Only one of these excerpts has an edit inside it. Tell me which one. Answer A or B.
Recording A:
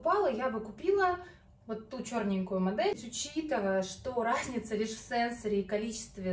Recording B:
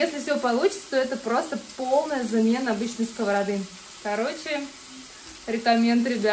A